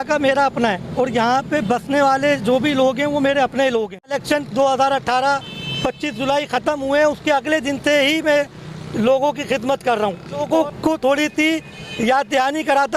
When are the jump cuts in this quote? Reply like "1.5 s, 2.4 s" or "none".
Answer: 4.2 s, 10.4 s

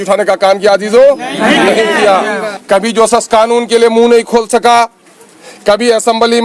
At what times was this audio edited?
2.5 s

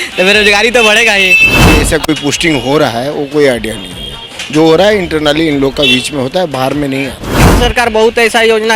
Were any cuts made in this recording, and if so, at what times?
1.7 s, 7.5 s

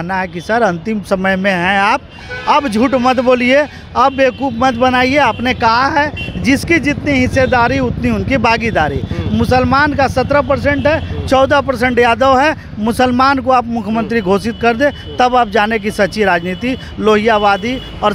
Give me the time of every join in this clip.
none

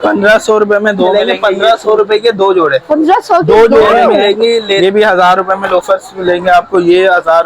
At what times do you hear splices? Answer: 1.1 s, 4.8 s

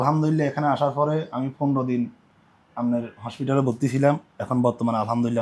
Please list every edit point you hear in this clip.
none

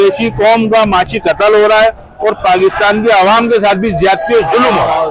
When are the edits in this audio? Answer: none

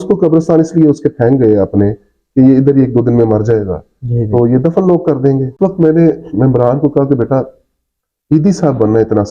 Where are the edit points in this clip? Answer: 5.5 s

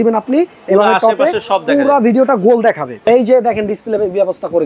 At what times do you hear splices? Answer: 3.0 s

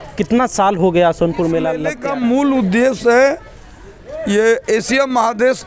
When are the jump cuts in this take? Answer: 1.9 s

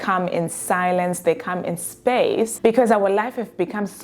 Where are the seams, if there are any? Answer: 2.5 s

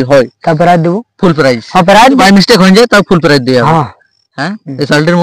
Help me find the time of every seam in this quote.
2.2 s

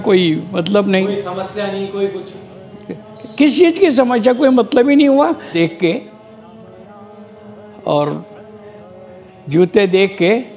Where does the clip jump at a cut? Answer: 5.5 s

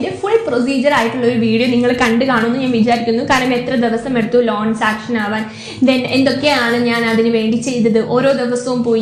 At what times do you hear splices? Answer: none

